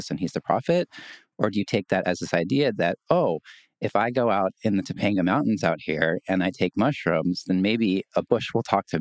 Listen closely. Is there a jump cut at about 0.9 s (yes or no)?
no